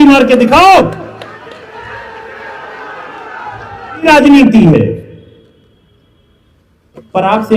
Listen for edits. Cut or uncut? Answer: cut